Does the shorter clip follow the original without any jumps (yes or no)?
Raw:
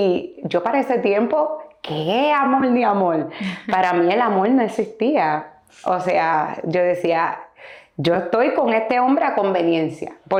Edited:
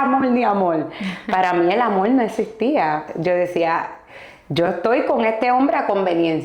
no